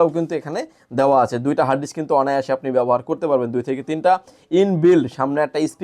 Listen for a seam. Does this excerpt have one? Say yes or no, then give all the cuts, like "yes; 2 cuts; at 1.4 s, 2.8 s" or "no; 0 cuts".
no; 0 cuts